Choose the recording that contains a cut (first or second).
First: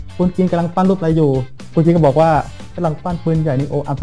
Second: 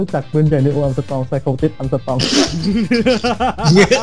first